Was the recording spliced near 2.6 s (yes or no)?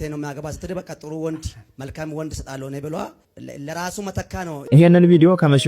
no